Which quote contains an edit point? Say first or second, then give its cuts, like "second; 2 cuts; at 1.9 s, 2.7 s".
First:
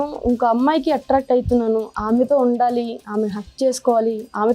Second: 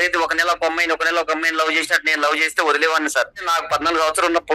second; 1 cut; at 3.4 s